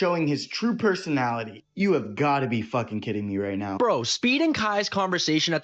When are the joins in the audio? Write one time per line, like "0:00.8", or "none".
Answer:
0:03.9